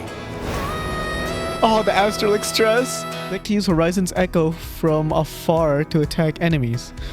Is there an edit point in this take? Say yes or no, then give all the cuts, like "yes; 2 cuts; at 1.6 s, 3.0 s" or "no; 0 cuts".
yes; 1 cut; at 3.4 s